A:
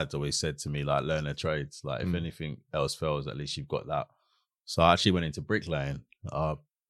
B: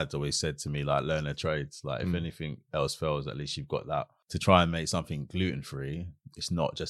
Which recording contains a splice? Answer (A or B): B